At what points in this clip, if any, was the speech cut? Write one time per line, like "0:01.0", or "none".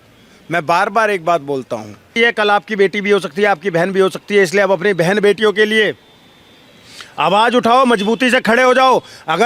0:02.2